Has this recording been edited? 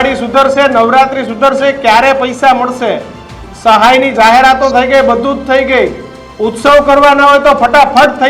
no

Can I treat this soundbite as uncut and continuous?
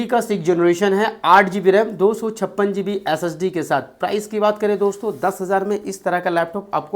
yes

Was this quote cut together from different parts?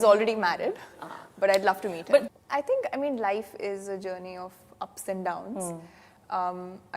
yes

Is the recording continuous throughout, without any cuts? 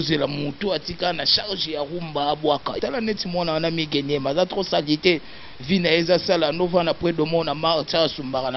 no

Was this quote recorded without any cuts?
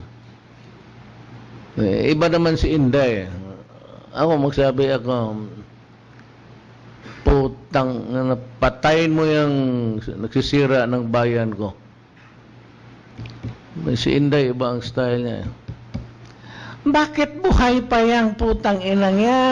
yes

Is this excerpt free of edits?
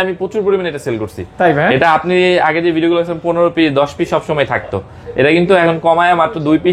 yes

